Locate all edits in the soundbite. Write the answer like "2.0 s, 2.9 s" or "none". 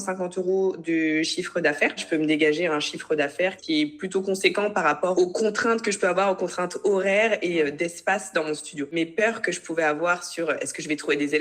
2.0 s, 3.6 s, 5.1 s, 8.9 s